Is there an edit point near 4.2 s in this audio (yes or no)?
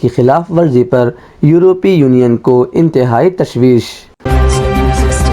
yes